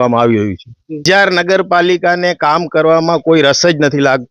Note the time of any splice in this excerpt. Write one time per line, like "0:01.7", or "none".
0:01.0